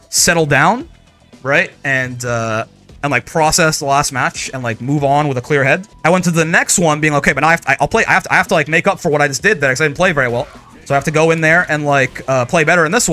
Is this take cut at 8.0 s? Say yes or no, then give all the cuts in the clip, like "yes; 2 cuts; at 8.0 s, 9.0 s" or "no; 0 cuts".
no; 1 cut; at 5.9 s